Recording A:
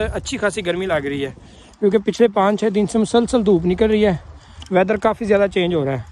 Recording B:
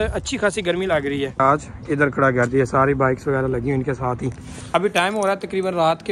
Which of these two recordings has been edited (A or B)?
B